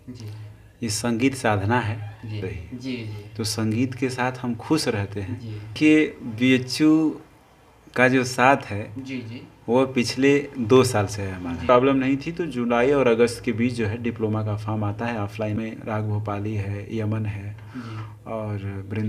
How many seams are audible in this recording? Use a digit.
4